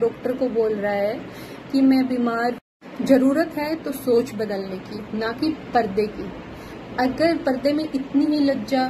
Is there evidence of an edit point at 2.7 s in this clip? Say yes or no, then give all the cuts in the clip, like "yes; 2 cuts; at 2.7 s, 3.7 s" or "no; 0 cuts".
yes; 1 cut; at 2.7 s